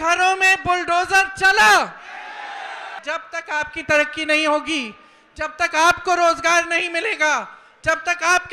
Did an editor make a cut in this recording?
yes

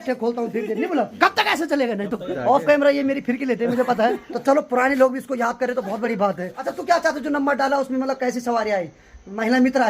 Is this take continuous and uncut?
no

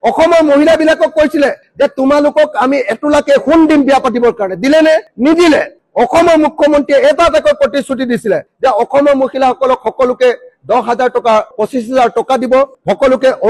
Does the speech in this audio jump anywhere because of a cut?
no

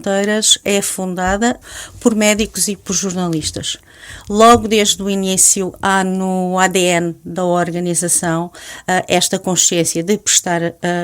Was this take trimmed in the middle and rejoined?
yes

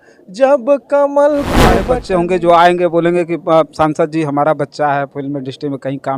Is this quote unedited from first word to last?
no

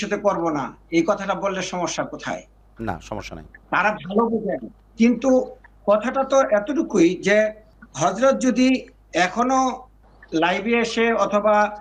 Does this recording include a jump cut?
no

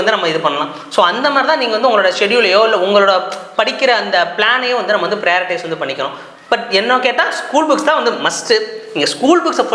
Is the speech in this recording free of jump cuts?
yes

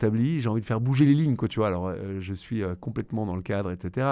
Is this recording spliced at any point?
no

